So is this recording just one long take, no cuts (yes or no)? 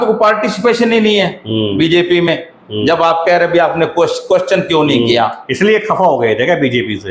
yes